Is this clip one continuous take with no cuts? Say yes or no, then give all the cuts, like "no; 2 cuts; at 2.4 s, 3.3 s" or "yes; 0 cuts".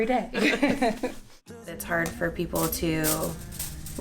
no; 1 cut; at 1.8 s